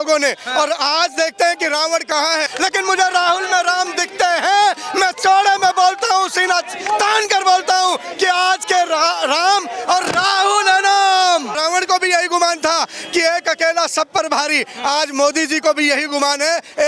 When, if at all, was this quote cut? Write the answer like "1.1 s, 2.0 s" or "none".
2.5 s, 11.5 s